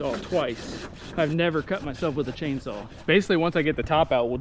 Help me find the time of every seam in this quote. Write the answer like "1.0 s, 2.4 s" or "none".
2.9 s